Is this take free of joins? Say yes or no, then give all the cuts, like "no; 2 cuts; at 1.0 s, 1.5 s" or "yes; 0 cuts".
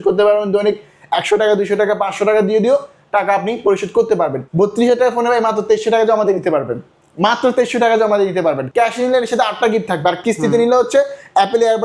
no; 2 cuts; at 4.4 s, 8.6 s